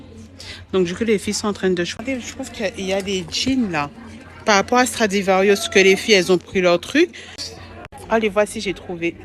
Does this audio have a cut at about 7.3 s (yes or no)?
yes